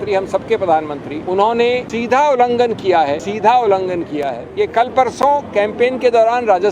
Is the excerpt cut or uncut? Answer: cut